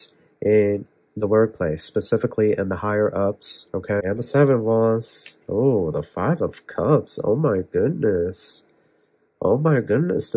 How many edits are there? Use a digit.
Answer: 1